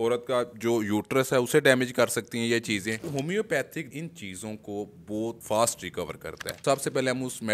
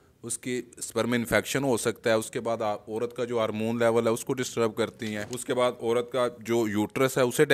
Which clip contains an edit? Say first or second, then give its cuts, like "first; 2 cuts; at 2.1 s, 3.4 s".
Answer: first; 4 cuts; at 3.0 s, 3.9 s, 5.4 s, 6.6 s